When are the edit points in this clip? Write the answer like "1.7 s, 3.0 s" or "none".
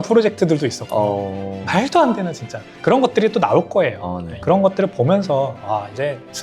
2.6 s, 4.3 s